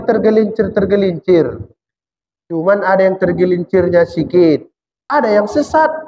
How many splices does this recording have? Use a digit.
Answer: 1